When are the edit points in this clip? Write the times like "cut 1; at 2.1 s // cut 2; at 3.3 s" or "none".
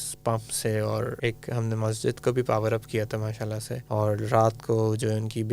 cut 1; at 1.1 s // cut 2; at 3.7 s